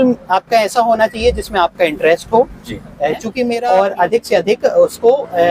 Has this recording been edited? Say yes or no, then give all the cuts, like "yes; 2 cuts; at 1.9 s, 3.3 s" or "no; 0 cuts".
yes; 1 cut; at 3.5 s